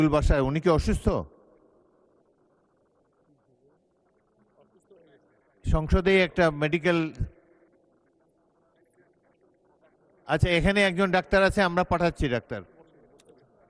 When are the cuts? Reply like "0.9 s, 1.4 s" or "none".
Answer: none

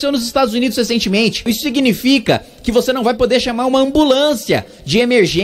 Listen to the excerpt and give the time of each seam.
1.5 s

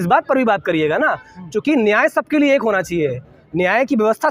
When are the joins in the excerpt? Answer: none

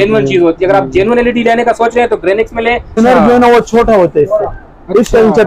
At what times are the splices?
3.0 s

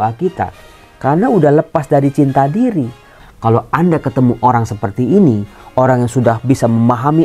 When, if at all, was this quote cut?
3.1 s

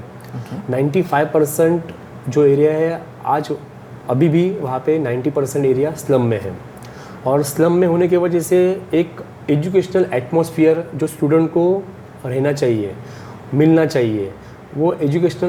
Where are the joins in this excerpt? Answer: none

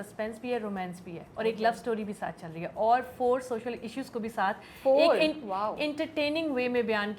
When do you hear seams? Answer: none

